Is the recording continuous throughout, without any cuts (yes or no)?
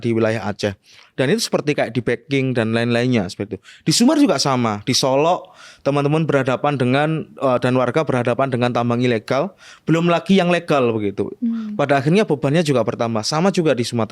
yes